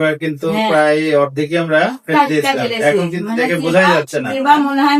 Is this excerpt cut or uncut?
uncut